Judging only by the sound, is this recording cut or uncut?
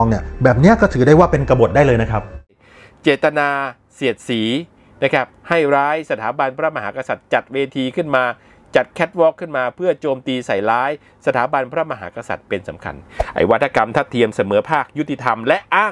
cut